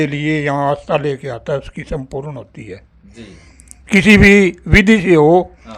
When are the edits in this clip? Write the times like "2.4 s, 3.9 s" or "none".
none